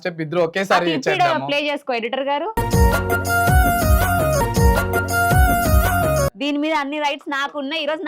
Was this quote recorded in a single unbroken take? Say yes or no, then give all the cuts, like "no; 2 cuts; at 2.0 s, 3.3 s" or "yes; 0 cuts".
no; 2 cuts; at 2.5 s, 6.4 s